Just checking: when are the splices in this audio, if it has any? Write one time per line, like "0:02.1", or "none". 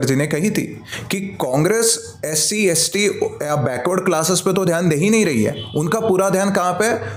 none